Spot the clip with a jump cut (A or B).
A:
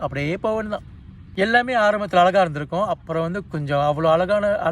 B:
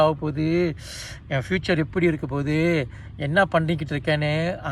A